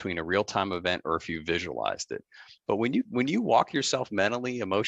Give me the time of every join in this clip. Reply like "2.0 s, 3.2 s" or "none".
2.5 s